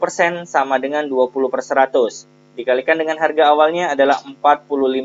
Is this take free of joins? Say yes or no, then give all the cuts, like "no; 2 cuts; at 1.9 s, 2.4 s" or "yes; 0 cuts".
yes; 0 cuts